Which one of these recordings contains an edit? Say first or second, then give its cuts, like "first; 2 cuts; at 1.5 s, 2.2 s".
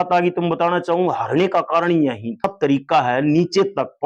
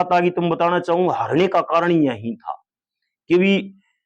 first; 1 cut; at 2.5 s